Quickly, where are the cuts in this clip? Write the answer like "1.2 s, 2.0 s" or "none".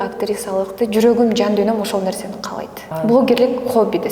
2.9 s